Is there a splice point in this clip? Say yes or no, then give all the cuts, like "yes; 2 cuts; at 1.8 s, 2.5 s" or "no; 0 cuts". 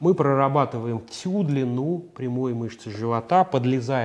no; 0 cuts